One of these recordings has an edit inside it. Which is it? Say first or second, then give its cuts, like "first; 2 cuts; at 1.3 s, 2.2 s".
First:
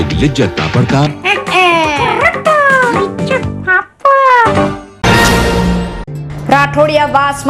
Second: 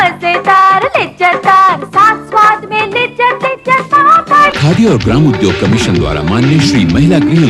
first; 1 cut; at 4.9 s